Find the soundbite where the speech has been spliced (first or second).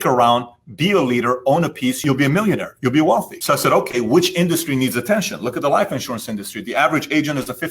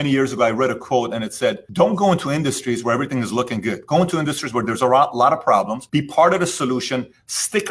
first